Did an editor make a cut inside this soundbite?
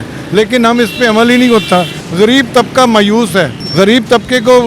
yes; 2 cuts; at 2.0 s, 3.6 s

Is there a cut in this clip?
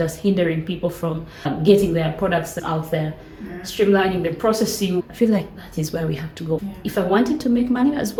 no; 0 cuts

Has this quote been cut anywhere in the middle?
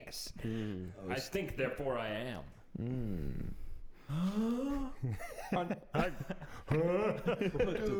no; 0 cuts

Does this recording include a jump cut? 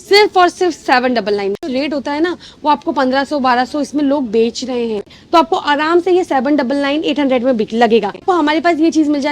yes; 3 cuts; at 1.7 s, 5.1 s, 8.2 s

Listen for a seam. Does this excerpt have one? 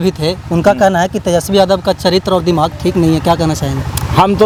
no; 0 cuts

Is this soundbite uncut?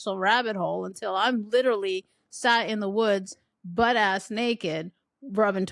yes; 0 cuts

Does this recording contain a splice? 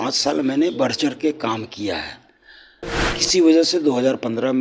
no; 0 cuts

